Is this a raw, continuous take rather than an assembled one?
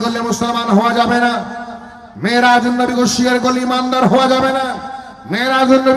yes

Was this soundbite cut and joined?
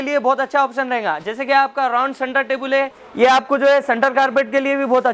yes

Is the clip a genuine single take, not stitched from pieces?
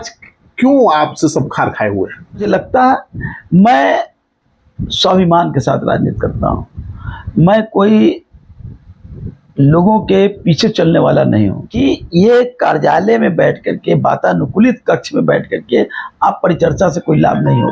no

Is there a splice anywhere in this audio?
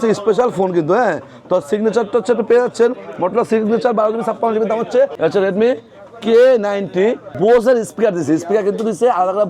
yes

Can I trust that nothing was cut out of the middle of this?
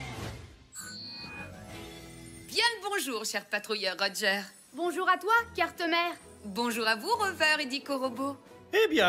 no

